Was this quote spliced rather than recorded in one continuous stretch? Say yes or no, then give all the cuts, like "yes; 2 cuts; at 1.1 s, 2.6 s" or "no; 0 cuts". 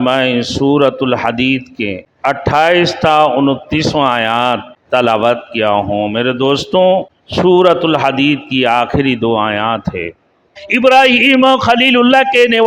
yes; 4 cuts; at 2.1 s, 4.7 s, 7.2 s, 10.6 s